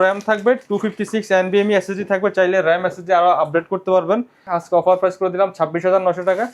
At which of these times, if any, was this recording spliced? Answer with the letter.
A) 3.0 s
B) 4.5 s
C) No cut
B